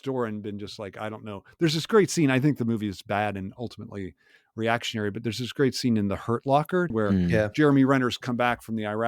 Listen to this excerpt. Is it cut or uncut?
cut